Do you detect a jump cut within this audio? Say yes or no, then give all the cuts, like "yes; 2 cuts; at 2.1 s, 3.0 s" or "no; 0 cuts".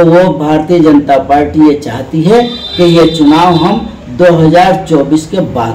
no; 0 cuts